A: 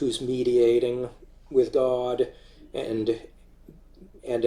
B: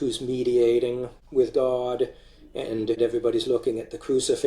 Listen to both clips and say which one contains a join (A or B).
B